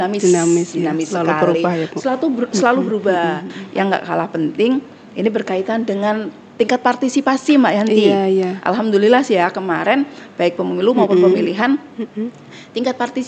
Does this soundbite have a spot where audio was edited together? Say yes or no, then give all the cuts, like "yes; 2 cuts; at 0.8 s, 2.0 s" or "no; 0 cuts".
yes; 1 cut; at 3.6 s